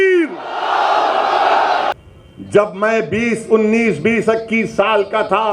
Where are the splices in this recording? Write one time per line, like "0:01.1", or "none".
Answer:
0:01.9